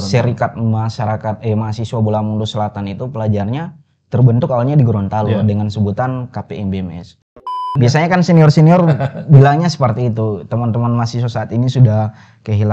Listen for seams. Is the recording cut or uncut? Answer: cut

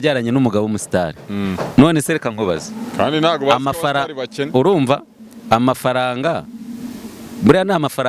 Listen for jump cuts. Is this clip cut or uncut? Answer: uncut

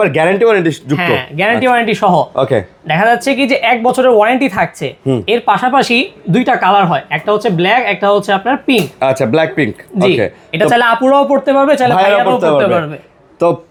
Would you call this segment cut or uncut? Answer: uncut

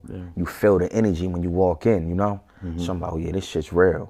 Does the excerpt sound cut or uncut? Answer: uncut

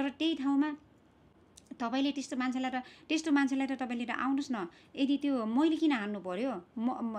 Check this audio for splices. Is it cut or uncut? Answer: uncut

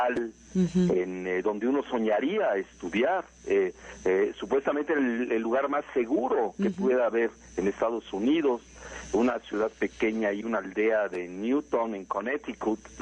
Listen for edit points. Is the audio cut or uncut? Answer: cut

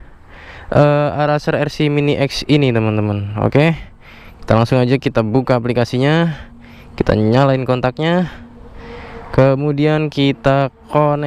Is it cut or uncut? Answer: uncut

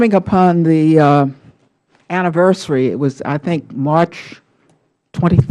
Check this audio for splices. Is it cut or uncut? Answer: uncut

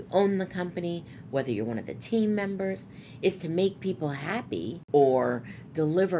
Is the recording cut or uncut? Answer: cut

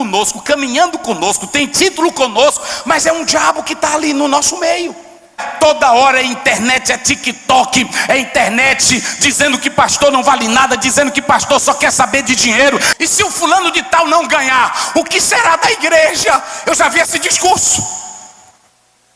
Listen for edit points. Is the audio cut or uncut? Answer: cut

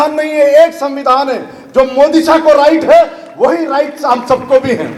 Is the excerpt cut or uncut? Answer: uncut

